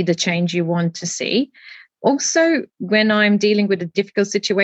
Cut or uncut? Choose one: uncut